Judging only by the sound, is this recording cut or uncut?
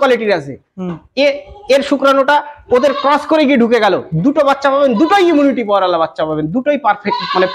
uncut